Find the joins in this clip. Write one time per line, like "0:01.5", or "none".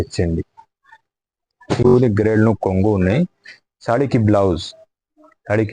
0:01.9